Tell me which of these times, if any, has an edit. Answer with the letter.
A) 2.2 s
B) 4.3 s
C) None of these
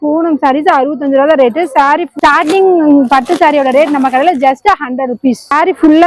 A